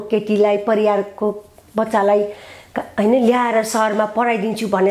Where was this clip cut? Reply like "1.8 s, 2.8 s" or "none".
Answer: none